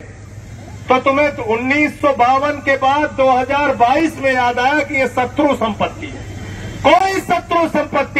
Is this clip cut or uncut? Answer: uncut